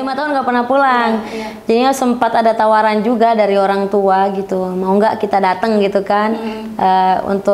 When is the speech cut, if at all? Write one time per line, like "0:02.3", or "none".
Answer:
none